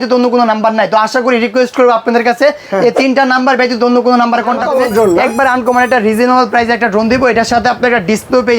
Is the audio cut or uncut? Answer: cut